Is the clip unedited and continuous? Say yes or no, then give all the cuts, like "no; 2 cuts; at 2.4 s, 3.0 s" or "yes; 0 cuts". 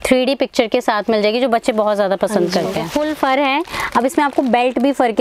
no; 1 cut; at 2.9 s